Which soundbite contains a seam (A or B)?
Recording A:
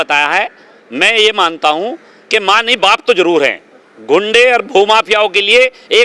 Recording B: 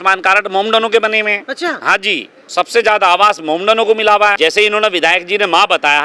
B